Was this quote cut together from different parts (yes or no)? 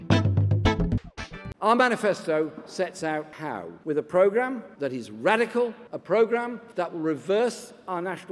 yes